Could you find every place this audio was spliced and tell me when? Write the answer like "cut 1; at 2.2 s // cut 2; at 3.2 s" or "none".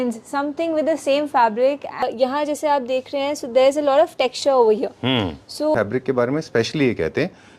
cut 1; at 2.0 s // cut 2; at 5.7 s